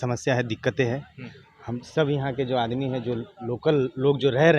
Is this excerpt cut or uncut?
uncut